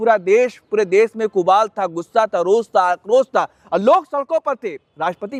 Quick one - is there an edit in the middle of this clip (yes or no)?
no